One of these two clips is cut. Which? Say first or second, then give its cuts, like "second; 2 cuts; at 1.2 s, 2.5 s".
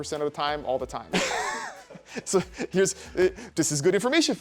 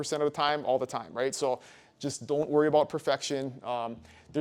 first; 2 cuts; at 1.1 s, 3.4 s